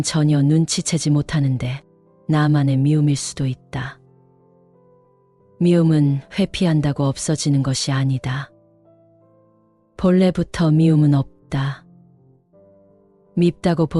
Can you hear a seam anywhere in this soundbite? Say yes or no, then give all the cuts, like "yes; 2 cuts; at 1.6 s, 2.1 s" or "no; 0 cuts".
no; 0 cuts